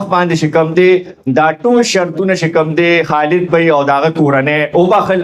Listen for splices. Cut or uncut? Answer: uncut